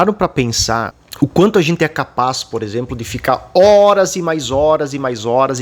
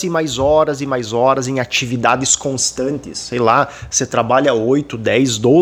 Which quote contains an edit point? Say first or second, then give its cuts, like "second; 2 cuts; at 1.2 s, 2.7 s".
first; 1 cut; at 1.0 s